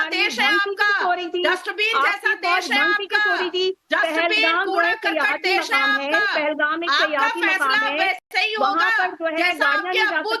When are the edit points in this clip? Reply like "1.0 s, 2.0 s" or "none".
none